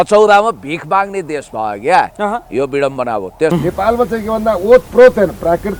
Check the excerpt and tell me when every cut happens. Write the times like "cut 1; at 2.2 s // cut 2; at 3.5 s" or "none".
cut 1; at 3.5 s